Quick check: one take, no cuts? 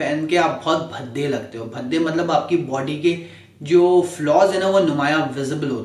yes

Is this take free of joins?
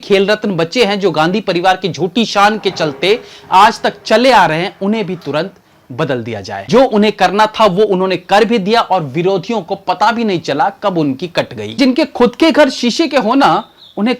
no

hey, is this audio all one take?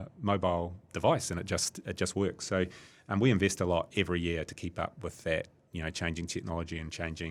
yes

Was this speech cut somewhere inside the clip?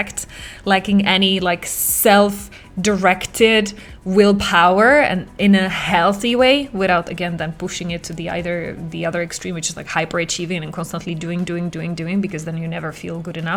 no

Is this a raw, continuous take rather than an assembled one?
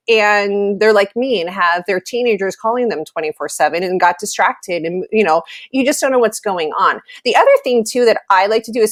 yes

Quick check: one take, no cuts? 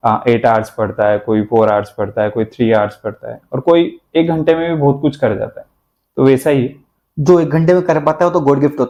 yes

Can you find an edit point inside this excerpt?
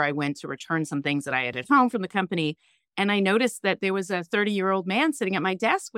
no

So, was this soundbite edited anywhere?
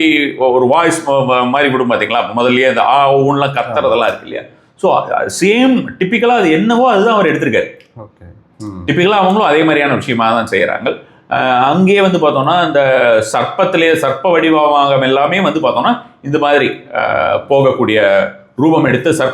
no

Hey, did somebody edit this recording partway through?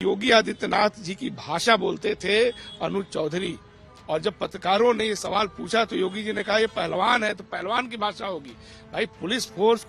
no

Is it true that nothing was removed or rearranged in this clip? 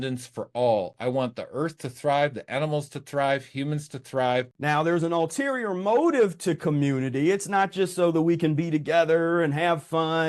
no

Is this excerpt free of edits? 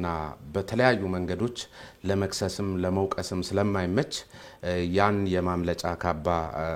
yes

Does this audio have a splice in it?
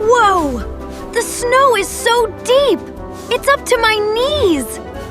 no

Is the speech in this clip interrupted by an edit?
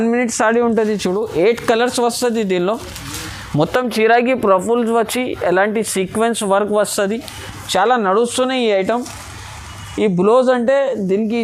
no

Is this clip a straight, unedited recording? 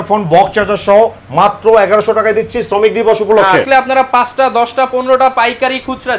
no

